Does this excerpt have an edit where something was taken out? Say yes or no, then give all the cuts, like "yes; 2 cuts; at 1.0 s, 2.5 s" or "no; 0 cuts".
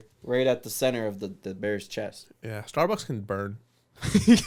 no; 0 cuts